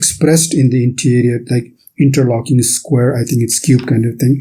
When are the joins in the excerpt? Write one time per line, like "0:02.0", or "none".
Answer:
none